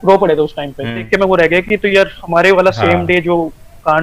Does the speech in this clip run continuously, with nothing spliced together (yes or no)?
no